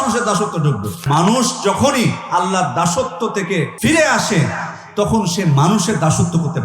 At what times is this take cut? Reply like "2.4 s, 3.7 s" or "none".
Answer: 1.0 s, 3.7 s